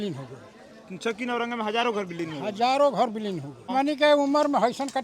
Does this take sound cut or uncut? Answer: cut